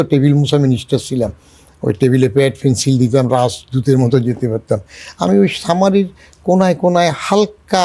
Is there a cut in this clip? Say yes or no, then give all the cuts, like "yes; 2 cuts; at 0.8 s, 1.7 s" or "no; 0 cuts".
no; 0 cuts